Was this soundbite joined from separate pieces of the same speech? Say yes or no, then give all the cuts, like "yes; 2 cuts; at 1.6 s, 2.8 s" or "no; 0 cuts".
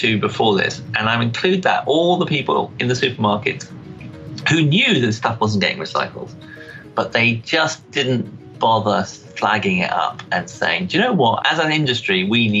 yes; 1 cut; at 11.4 s